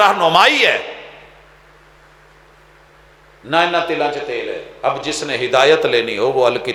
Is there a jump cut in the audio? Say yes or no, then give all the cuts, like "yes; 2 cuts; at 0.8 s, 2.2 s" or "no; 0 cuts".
no; 0 cuts